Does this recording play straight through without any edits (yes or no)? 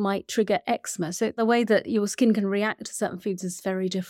no